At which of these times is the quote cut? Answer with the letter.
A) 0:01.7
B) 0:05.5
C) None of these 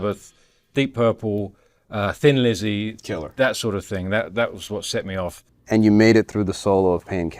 B